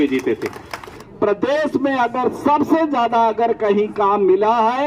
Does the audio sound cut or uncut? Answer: cut